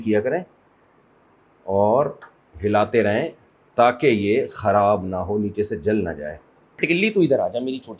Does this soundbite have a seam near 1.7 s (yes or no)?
no